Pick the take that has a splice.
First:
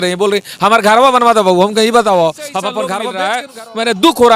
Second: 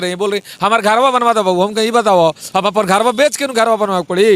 first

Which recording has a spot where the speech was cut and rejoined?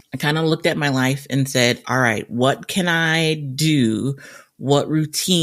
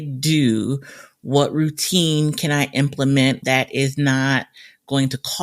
second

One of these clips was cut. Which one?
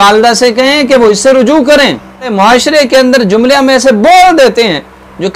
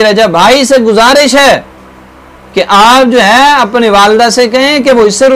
first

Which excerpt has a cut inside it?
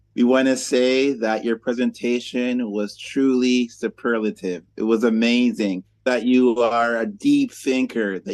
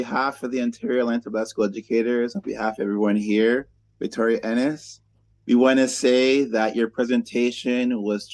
first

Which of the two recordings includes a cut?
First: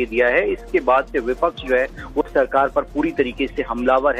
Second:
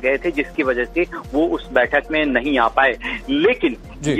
second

